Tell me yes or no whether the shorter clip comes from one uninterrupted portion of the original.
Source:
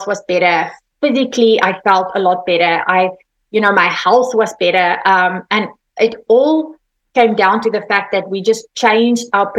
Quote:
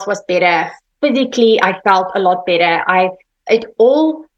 no